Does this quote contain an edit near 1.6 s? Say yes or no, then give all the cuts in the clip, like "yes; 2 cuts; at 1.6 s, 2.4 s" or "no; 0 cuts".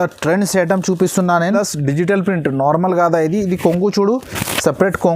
yes; 1 cut; at 1.6 s